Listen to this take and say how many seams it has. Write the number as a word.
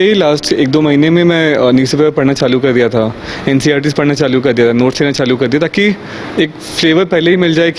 zero